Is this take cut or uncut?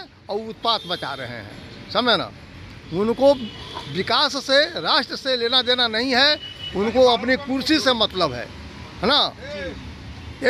uncut